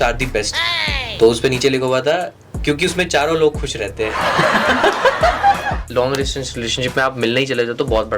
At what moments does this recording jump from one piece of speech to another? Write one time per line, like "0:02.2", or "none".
0:05.8